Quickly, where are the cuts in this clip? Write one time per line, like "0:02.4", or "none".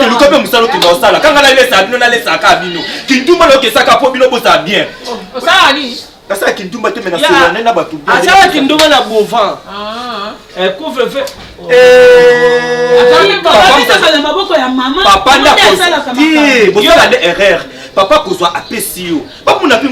none